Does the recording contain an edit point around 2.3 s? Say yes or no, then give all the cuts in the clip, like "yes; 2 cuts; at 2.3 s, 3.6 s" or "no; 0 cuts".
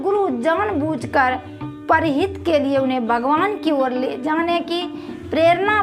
no; 0 cuts